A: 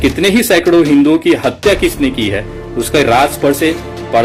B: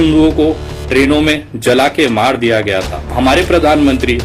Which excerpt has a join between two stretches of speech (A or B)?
B